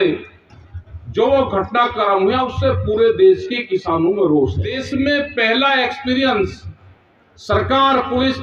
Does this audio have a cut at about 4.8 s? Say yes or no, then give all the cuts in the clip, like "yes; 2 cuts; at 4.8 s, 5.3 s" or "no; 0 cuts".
yes; 1 cut; at 4.8 s